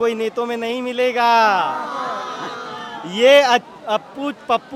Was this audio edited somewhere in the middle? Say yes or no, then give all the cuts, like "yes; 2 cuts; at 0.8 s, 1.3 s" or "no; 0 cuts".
no; 0 cuts